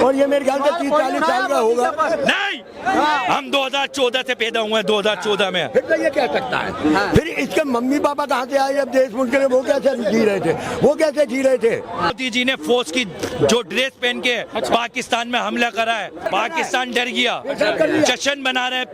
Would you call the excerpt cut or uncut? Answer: cut